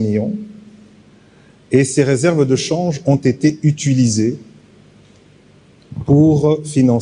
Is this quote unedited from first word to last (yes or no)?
yes